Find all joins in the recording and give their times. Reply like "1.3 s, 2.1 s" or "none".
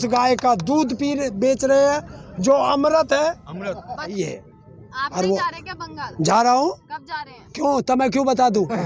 4.1 s